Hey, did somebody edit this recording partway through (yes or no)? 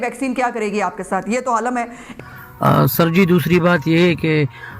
yes